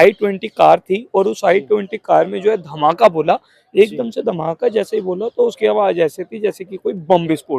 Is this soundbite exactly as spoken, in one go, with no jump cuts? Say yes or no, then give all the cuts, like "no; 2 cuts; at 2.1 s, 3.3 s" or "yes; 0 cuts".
yes; 0 cuts